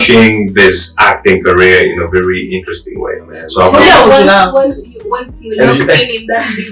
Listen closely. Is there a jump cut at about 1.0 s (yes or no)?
no